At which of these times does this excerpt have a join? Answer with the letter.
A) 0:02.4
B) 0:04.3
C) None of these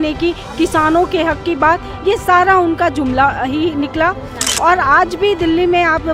C